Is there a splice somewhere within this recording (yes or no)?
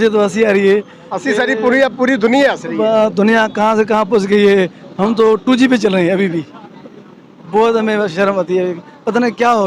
no